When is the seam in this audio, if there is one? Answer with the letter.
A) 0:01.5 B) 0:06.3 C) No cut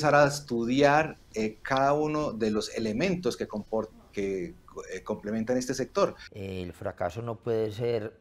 B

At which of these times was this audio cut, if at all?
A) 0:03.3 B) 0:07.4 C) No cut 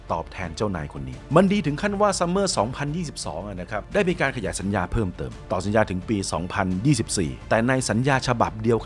B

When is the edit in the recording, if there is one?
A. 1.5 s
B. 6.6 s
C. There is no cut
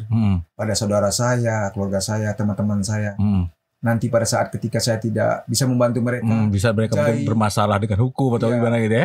C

